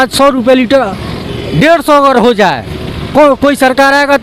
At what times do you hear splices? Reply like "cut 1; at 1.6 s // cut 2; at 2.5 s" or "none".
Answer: none